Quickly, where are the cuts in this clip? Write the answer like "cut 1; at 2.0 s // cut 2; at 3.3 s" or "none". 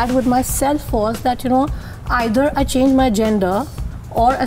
none